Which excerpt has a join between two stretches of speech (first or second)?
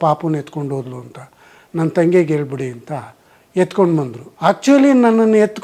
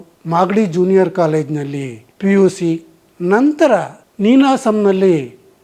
first